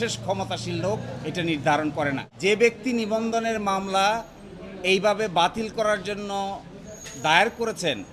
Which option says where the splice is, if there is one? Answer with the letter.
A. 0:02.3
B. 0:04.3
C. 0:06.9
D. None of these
A